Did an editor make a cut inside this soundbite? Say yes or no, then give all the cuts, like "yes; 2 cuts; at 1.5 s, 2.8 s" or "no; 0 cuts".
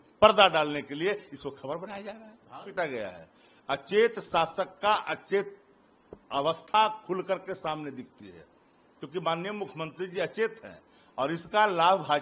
yes; 1 cut; at 2.7 s